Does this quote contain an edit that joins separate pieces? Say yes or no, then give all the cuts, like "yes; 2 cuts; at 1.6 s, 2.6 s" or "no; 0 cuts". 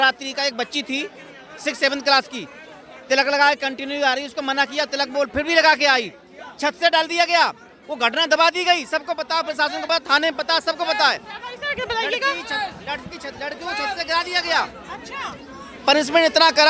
no; 0 cuts